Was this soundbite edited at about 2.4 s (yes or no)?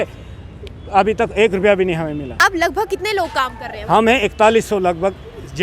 yes